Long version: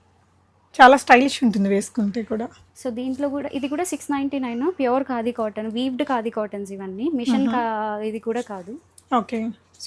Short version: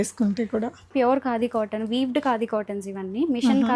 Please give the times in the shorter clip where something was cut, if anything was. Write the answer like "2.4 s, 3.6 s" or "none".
0.9 s